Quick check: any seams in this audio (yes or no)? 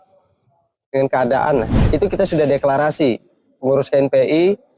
yes